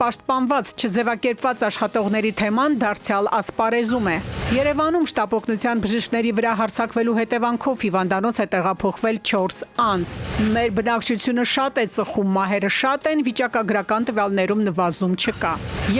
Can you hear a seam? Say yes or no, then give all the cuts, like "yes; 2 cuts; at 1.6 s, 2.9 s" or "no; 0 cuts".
yes; 1 cut; at 10.3 s